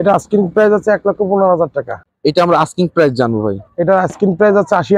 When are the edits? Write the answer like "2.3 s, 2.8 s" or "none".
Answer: 2.0 s